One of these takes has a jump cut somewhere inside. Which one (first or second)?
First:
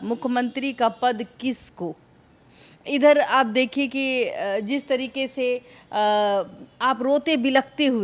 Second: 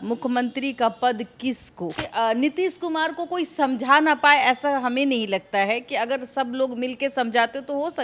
second